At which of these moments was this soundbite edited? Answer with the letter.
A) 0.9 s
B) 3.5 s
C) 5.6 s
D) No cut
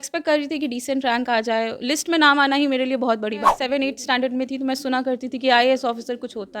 B